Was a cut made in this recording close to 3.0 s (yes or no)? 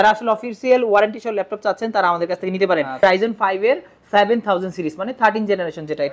yes